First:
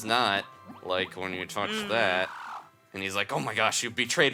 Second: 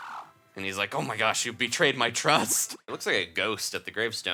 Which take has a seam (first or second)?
second